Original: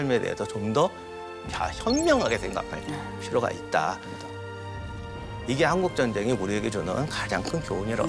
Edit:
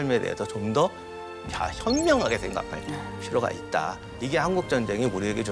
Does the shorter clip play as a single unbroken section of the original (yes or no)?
no